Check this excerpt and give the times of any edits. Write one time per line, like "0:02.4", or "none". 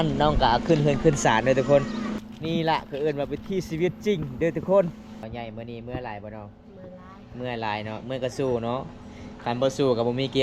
0:02.2
0:05.3